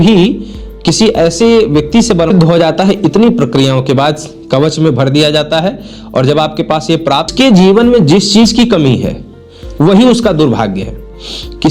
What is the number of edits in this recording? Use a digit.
2